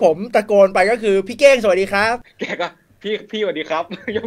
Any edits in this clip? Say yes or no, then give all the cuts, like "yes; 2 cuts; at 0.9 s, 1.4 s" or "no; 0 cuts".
yes; 1 cut; at 2.2 s